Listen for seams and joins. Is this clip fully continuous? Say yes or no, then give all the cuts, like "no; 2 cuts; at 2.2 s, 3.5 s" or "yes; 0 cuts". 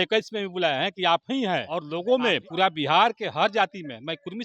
no; 1 cut; at 1.9 s